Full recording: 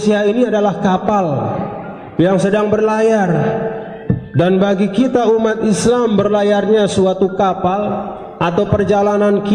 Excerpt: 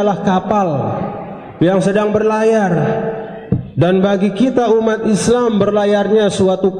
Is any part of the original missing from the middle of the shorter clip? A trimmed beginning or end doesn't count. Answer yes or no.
no